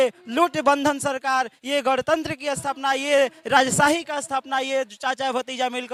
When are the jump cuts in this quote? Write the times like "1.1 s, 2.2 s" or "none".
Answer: none